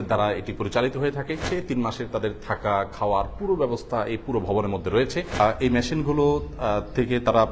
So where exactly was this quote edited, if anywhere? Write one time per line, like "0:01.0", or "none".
0:01.4
0:05.3